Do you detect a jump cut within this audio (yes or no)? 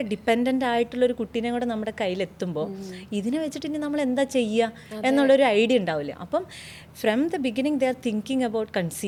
no